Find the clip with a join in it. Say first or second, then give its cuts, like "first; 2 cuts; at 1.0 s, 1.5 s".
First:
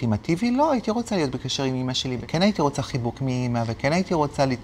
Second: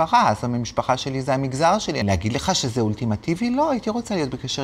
second; 1 cut; at 2.0 s